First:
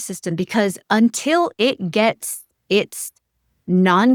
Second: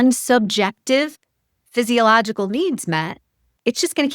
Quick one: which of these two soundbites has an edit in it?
second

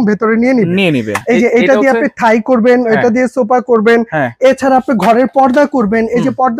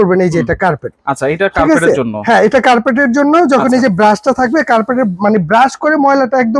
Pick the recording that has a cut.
first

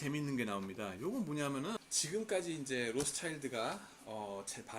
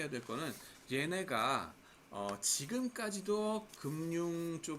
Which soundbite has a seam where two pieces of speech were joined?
first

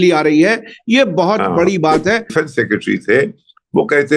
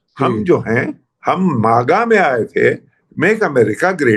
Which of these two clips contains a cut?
first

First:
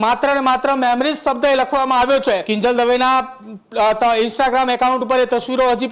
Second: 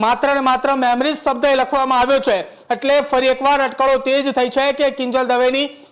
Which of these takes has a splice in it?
first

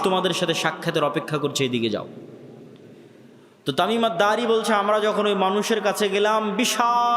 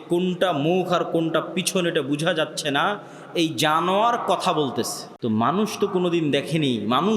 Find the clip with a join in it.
second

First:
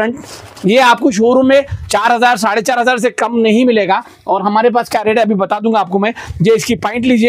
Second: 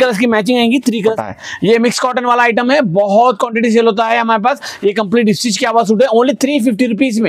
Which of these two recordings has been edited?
second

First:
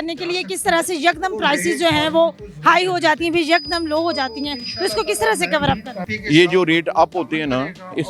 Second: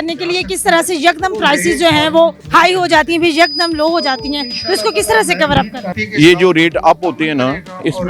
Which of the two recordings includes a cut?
second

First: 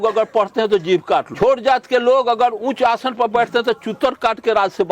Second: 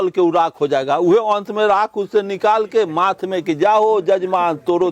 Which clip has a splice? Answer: first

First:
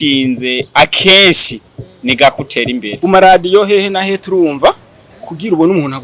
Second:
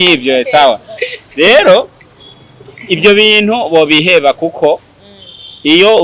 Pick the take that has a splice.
first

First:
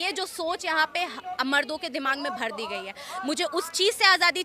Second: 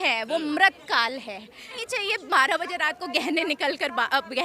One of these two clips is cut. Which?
second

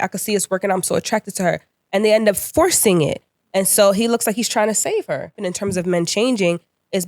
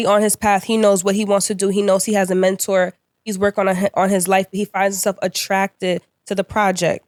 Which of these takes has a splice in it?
first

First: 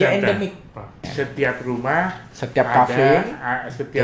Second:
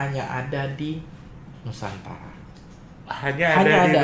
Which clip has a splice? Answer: first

